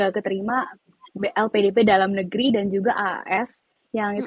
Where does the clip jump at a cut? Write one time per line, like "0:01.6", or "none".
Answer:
none